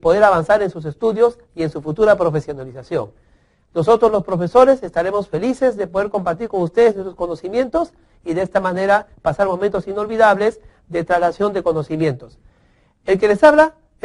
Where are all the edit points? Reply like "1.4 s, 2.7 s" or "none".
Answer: none